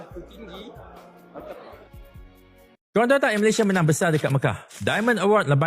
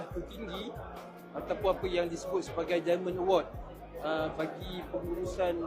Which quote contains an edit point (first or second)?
first